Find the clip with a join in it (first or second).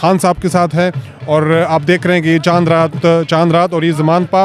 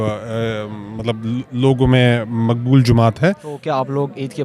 second